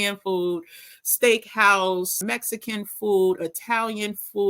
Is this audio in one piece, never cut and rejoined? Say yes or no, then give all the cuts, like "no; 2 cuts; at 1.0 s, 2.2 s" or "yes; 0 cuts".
no; 1 cut; at 2.2 s